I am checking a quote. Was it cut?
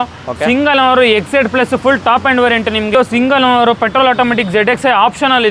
yes; 1 cut; at 2.9 s

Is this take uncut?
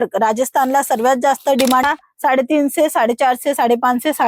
no; 1 cut; at 1.8 s

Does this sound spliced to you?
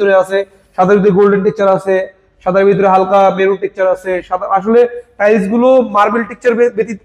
no; 0 cuts

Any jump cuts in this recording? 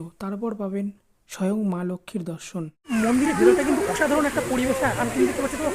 yes; 1 cut; at 2.8 s

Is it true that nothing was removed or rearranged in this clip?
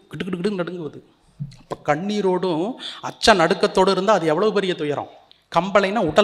yes; 0 cuts

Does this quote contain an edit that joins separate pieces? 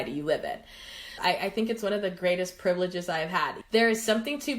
yes; 2 cuts; at 1.1 s, 3.6 s

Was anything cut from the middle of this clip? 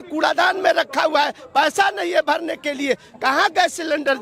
no; 0 cuts

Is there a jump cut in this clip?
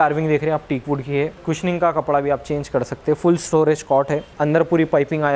yes; 2 cuts; at 1.4 s, 4.3 s

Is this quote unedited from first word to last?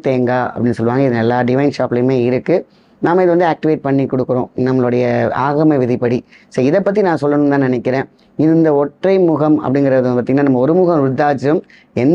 yes; 0 cuts

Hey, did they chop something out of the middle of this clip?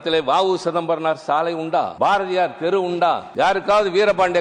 yes; 2 cuts; at 1.9 s, 3.3 s

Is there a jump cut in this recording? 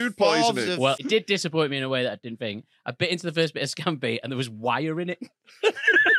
yes; 1 cut; at 1.0 s

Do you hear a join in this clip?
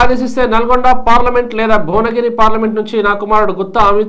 no; 0 cuts

